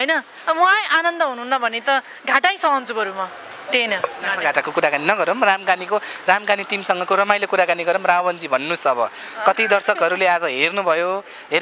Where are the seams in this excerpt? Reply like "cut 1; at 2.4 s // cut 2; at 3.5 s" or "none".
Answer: none